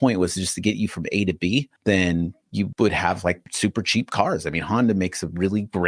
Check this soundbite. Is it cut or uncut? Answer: uncut